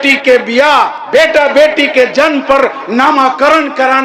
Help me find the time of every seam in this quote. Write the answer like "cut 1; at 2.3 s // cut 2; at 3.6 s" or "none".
none

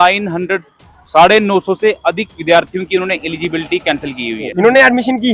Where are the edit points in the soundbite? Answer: cut 1; at 4.4 s

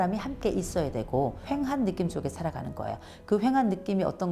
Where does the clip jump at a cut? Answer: cut 1; at 1.4 s

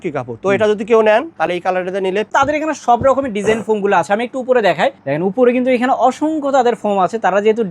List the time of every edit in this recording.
cut 1; at 2.3 s

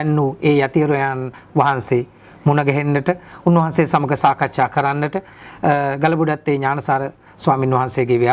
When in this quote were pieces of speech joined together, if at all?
none

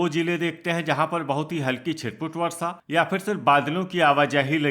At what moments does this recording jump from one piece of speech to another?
none

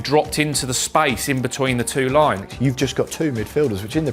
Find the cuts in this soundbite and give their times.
cut 1; at 2.4 s

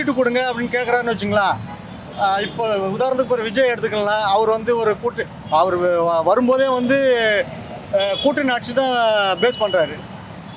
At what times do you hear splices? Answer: none

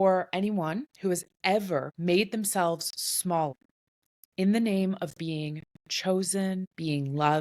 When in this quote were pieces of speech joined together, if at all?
cut 1; at 0.9 s // cut 2; at 1.9 s // cut 3; at 3.6 s

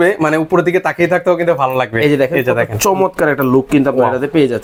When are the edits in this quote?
none

